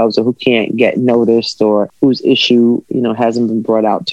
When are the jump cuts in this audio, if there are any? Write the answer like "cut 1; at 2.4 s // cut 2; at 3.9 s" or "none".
cut 1; at 1.9 s